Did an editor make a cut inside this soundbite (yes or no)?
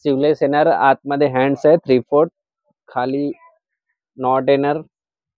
no